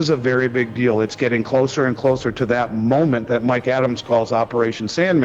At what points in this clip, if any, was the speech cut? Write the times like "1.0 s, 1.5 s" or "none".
none